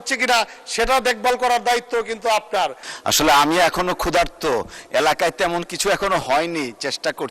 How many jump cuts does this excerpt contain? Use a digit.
1